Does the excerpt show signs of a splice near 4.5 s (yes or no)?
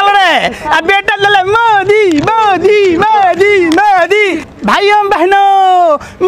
yes